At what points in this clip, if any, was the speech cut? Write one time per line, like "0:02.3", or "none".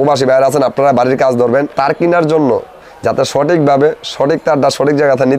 0:01.7